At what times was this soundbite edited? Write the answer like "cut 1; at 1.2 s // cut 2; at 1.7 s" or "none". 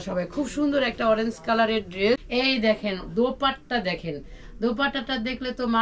cut 1; at 2.2 s

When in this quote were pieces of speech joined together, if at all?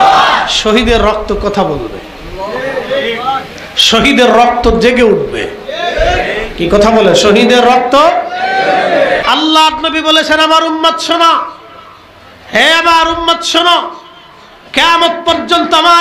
cut 1; at 9.2 s

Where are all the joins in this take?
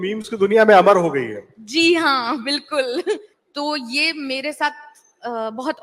cut 1; at 3.4 s

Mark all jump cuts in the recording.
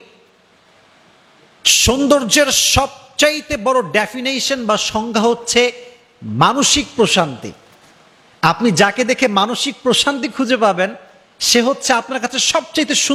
none

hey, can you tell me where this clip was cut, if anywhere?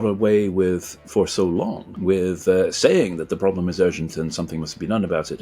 cut 1; at 1.9 s

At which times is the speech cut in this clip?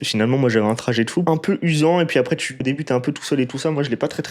cut 1; at 1.2 s // cut 2; at 2.6 s

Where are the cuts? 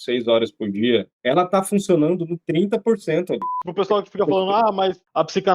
cut 1; at 3.5 s

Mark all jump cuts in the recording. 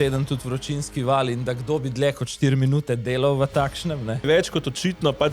cut 1; at 4.2 s

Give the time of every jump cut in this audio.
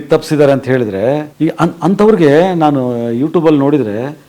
cut 1; at 1.3 s

